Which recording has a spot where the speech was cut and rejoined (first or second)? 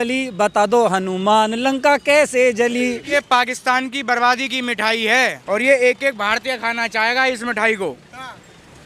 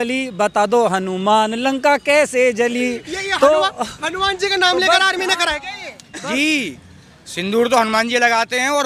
first